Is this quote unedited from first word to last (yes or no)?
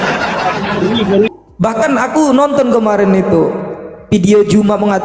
no